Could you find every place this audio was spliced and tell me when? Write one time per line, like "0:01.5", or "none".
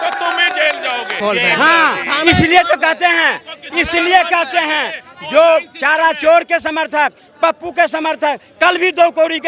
0:01.2